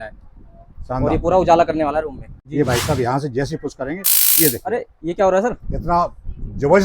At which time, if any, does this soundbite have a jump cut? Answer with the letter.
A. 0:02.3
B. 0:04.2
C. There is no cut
A